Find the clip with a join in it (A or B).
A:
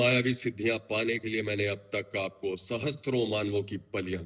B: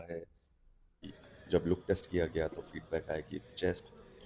B